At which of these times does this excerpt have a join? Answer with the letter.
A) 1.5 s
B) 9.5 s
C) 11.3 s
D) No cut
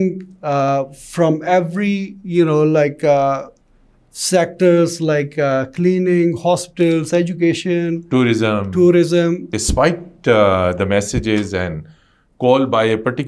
B